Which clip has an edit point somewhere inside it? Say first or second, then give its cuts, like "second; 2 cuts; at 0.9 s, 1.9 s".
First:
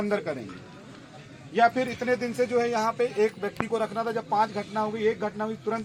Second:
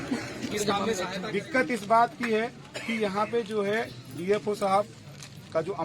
second; 1 cut; at 1.3 s